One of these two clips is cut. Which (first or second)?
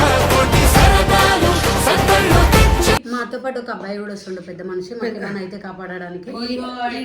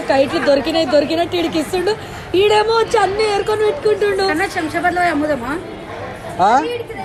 first